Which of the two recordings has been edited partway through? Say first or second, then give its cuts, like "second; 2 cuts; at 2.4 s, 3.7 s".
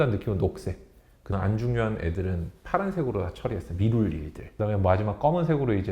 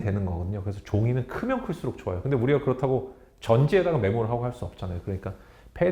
first; 2 cuts; at 1.3 s, 4.4 s